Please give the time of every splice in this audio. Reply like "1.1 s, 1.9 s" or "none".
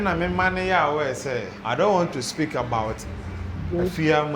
1.5 s